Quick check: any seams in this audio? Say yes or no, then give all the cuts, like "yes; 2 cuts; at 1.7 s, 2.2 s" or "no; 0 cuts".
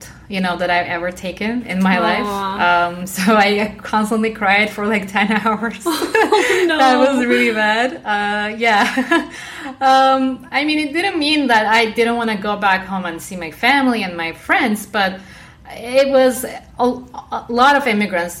yes; 1 cut; at 9.8 s